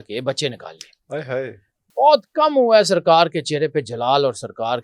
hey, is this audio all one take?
yes; 0 cuts

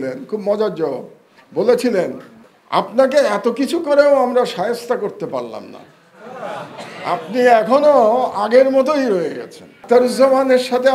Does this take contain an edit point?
yes; 1 cut; at 9.7 s

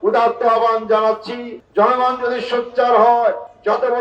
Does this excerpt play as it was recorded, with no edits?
no; 1 cut; at 1.5 s

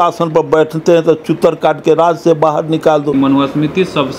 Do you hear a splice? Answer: yes; 1 cut; at 3.1 s

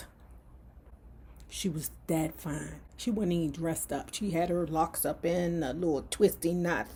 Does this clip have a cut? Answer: no; 0 cuts

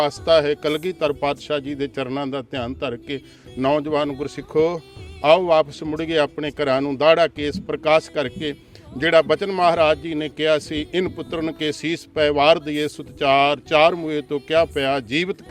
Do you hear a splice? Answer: no; 0 cuts

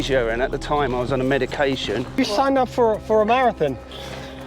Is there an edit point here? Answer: yes; 1 cut; at 2.2 s

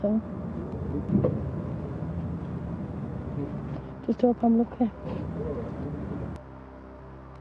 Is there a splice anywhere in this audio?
no; 0 cuts

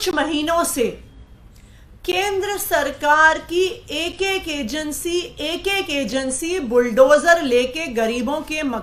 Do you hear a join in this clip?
no; 0 cuts

